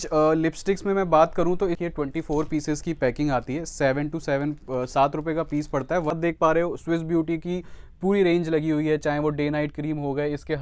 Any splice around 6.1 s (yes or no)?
yes